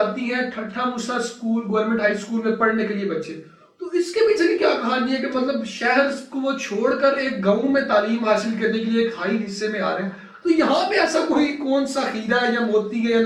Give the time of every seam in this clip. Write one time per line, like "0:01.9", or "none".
none

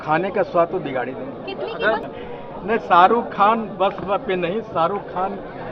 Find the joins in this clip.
0:02.1

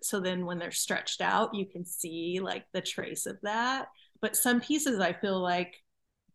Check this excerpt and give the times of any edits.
0:04.1

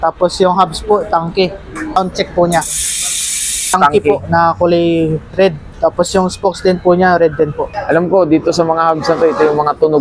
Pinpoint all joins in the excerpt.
0:01.9
0:03.7
0:07.8

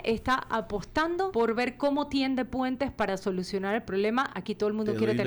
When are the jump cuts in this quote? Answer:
0:01.3

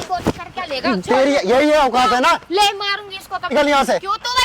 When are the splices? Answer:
0:03.5

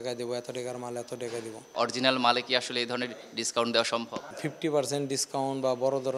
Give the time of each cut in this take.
0:01.7
0:04.3

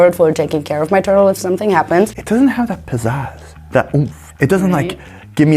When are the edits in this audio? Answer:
0:02.1

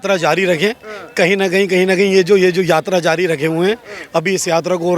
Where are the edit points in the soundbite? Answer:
none

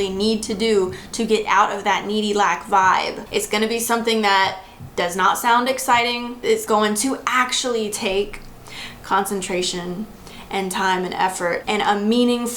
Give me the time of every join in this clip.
0:03.2
0:06.6
0:11.6

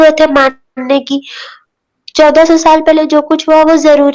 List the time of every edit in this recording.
none

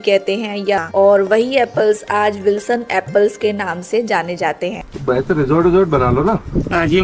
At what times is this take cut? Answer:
0:00.8
0:04.9

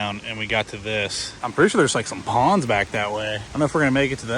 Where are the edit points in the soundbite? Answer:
0:01.3
0:03.4

